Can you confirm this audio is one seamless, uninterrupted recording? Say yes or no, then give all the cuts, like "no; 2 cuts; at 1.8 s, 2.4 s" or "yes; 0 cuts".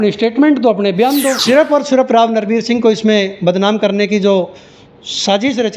no; 1 cut; at 1.4 s